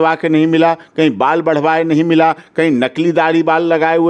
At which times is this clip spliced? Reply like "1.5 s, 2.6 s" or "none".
none